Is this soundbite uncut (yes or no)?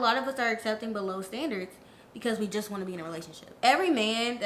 yes